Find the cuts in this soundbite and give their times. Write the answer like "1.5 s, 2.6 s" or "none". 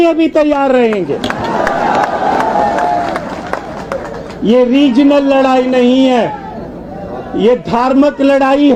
none

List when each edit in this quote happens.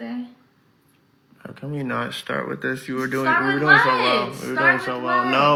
none

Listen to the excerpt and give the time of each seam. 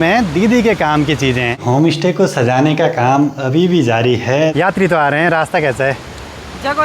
1.6 s, 4.5 s

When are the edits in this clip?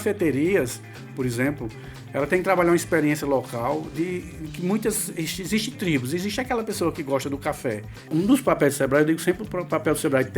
8.0 s

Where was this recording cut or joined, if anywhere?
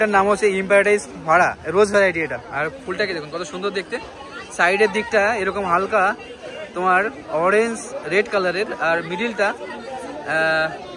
none

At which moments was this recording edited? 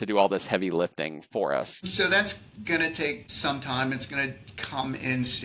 1.8 s, 3.3 s

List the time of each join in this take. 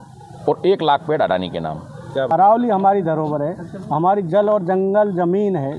2.3 s

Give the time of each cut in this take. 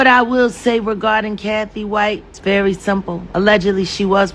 2.3 s, 3.2 s

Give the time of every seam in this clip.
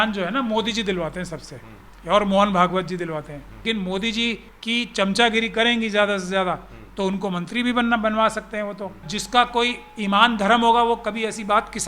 3.6 s, 4.5 s, 9.1 s

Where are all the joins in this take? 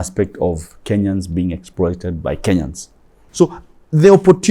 3.2 s

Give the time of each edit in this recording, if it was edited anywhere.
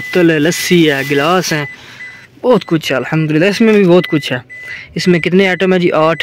none

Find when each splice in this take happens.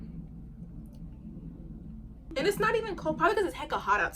2.3 s

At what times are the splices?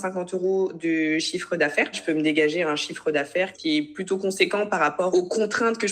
2.0 s, 3.6 s, 5.1 s

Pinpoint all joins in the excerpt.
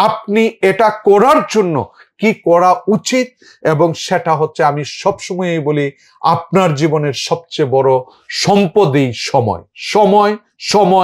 none

